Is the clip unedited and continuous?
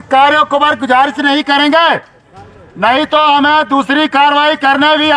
yes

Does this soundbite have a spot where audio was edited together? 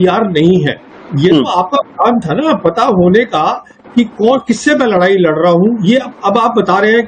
yes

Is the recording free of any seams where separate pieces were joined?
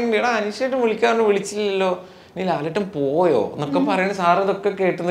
yes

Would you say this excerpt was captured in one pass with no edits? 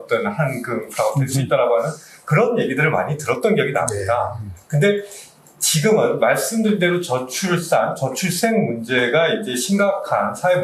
yes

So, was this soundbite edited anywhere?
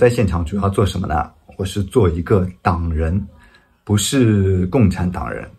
no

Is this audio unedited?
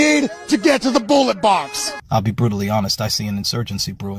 no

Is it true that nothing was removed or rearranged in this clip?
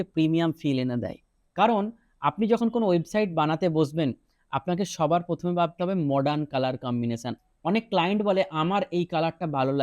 no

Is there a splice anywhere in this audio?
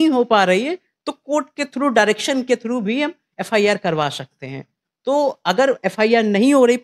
no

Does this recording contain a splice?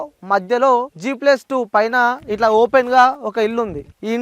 yes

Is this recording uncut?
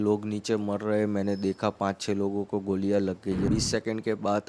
no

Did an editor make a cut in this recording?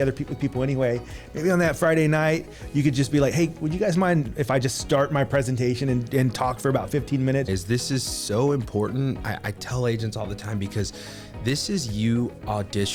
yes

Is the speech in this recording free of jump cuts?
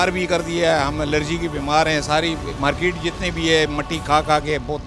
yes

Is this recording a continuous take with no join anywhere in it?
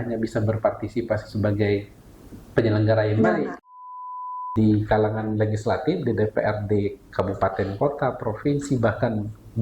no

